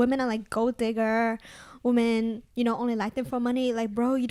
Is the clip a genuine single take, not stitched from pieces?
yes; 0 cuts

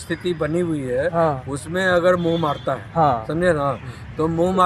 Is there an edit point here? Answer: no; 0 cuts

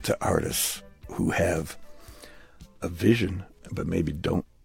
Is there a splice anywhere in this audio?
yes; 1 cut; at 3.5 s

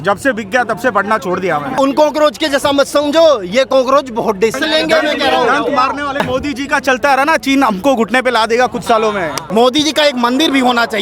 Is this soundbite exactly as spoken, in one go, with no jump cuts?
no; 4 cuts; at 1.8 s, 4.6 s, 6.2 s, 9.4 s

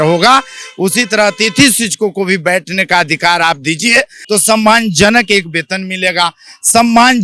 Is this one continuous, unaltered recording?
no; 1 cut; at 4.2 s

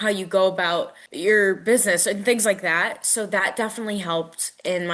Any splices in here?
yes; 1 cut; at 1.0 s

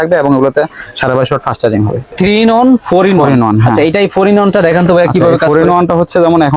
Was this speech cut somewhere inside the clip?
yes; 1 cut; at 2.1 s

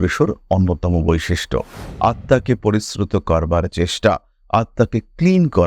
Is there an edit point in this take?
yes; 1 cut; at 1.8 s

